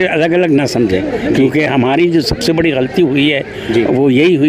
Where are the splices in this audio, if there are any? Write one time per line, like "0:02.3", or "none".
none